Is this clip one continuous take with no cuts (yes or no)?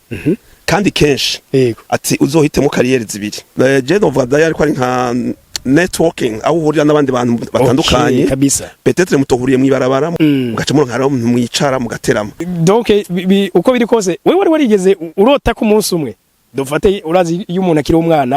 no